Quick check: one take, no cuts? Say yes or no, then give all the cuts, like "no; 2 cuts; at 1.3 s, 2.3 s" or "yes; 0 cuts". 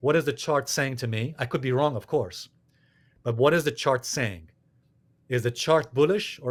yes; 0 cuts